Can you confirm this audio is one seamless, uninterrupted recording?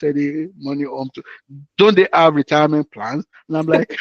yes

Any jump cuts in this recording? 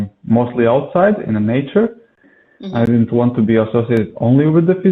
yes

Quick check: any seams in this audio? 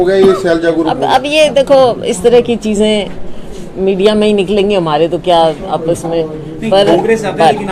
no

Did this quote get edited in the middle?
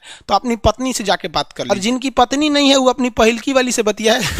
yes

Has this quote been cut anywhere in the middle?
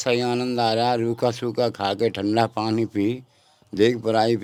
no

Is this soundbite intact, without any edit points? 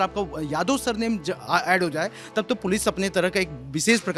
yes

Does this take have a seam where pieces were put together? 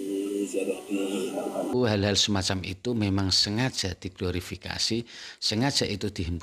yes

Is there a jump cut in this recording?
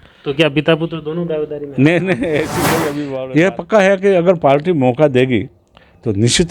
yes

